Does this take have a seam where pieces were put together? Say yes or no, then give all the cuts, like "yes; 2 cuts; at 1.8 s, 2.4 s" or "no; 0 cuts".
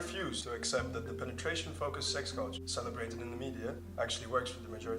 yes; 1 cut; at 3.1 s